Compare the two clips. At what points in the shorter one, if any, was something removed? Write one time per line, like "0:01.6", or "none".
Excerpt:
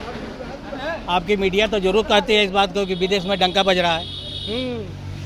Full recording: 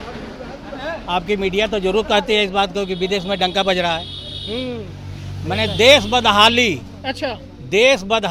none